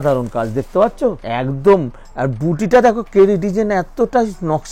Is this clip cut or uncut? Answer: cut